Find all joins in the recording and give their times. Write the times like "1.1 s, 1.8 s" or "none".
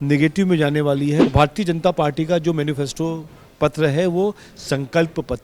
1.3 s

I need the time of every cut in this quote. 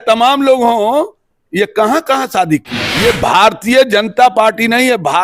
2.8 s

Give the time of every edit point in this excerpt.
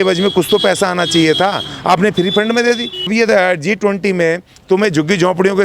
3.1 s

